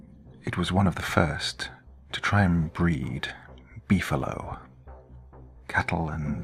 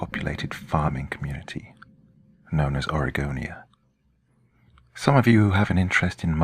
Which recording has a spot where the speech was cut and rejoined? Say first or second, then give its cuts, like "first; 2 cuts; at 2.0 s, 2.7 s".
second; 1 cut; at 3.1 s